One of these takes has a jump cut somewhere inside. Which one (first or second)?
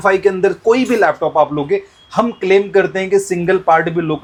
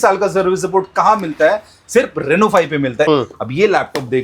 second